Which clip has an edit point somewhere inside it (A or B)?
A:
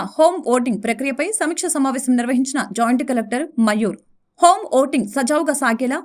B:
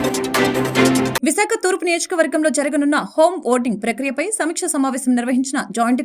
B